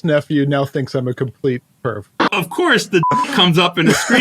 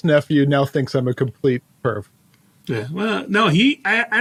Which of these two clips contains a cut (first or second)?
first